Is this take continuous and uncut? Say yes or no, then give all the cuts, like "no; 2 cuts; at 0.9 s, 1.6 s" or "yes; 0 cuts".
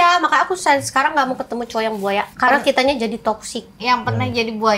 yes; 0 cuts